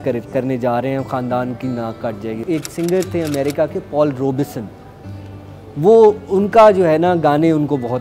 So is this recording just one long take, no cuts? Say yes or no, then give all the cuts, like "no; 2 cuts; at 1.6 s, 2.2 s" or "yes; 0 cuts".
yes; 0 cuts